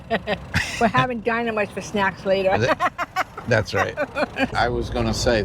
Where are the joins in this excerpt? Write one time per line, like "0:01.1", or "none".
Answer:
0:04.5